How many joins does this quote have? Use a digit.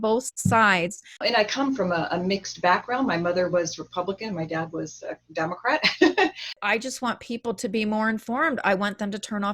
2